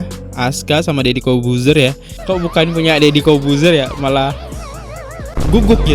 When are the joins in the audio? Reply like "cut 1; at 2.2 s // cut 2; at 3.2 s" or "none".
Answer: cut 1; at 2.1 s